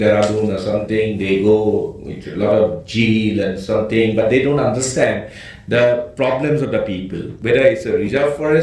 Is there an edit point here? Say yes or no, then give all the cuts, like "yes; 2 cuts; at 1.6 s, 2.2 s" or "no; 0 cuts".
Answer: yes; 1 cut; at 7.3 s